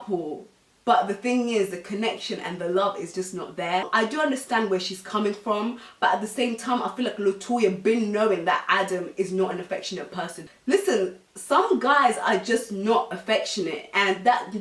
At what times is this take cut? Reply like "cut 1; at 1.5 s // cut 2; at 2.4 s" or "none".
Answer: cut 1; at 3.9 s // cut 2; at 10.4 s